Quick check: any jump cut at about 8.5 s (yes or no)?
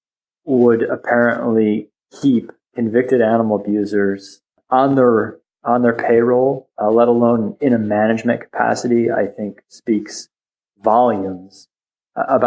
no